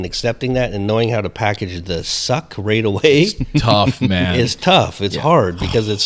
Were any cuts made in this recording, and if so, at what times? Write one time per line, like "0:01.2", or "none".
none